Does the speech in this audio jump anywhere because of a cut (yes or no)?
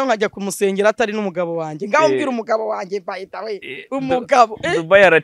no